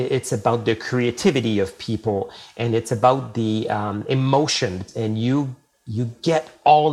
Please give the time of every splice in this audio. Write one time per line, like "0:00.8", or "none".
0:04.9